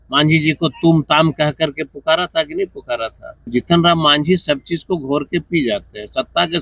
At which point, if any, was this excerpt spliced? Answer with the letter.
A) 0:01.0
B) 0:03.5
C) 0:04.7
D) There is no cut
B